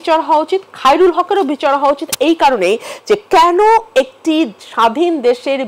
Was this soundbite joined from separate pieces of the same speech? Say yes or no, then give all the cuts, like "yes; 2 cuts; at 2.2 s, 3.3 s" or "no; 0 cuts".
no; 0 cuts